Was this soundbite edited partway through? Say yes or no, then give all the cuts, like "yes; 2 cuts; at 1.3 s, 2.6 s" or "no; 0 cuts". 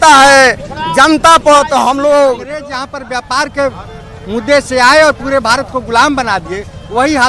yes; 1 cut; at 2.7 s